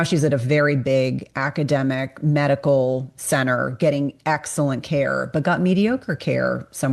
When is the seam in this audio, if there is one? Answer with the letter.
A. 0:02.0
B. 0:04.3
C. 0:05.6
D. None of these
D